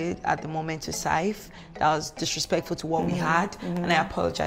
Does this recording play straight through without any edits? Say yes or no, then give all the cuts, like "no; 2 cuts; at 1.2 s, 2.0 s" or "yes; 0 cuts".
yes; 0 cuts